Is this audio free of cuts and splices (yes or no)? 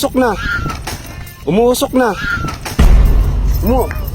yes